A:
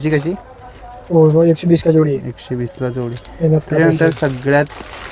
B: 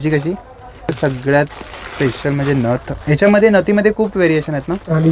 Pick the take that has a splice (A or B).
B